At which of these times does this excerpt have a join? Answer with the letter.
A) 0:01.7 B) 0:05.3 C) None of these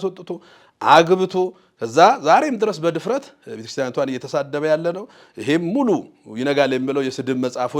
C